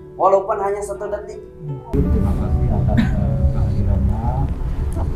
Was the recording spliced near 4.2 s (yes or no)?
no